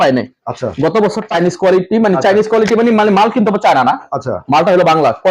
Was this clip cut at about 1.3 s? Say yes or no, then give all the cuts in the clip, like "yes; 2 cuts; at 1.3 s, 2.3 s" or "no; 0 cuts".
yes; 1 cut; at 1.3 s